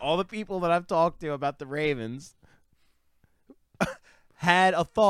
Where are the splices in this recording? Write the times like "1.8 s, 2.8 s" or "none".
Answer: none